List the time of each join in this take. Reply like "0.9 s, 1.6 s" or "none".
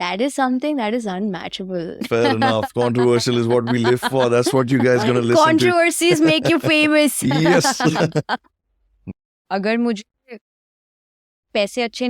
2.1 s, 9.1 s